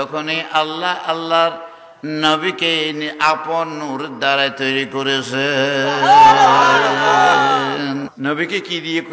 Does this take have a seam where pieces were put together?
yes; 1 cut; at 8.1 s

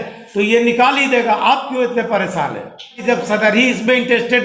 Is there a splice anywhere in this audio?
yes; 1 cut; at 3.0 s

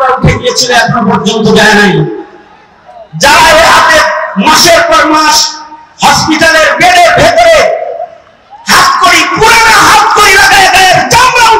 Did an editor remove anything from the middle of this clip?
no; 0 cuts

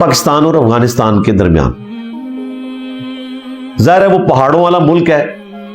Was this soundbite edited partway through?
yes; 2 cuts; at 2.2 s, 3.8 s

